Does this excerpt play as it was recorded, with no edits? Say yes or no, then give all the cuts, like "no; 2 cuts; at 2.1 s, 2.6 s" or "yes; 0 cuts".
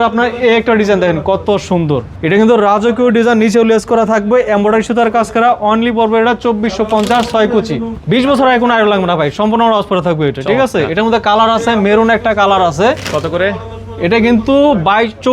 no; 2 cuts; at 2.1 s, 7.9 s